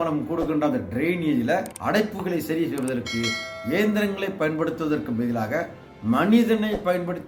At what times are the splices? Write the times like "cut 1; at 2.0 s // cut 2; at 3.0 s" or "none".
none